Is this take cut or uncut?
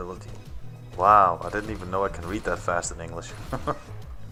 uncut